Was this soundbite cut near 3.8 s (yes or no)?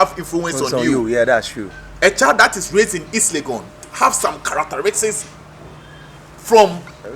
yes